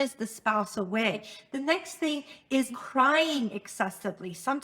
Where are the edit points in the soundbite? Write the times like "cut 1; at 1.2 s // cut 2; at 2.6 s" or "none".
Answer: cut 1; at 1.3 s // cut 2; at 2.7 s